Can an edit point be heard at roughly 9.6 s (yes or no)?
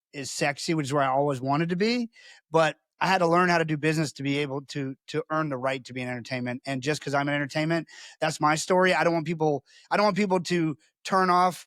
no